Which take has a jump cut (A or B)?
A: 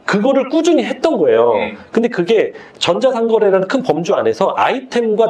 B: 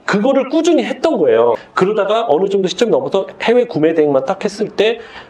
B